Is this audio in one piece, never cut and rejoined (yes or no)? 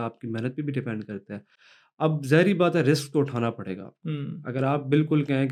yes